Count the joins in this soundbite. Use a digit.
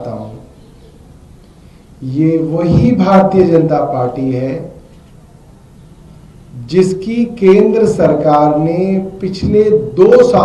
0